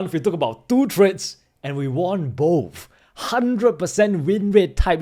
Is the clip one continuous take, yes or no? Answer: yes